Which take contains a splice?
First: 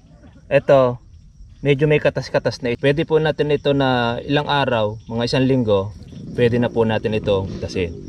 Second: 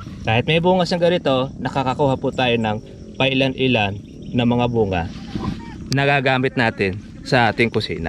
first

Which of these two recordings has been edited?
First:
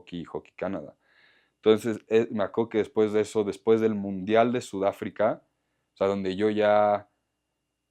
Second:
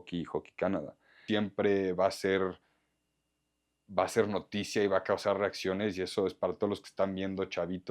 second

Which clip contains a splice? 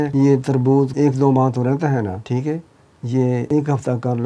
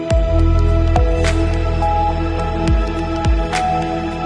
first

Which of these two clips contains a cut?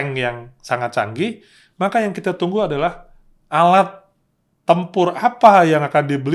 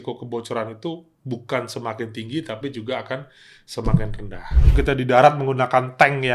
second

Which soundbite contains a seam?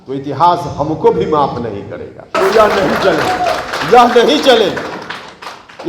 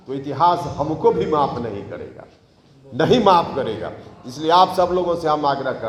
first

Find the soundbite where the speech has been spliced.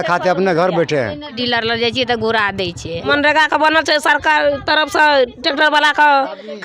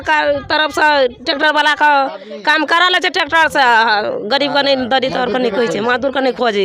first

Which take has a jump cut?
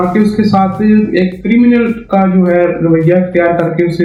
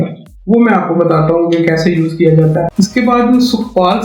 second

